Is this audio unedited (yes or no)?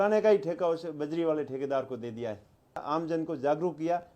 no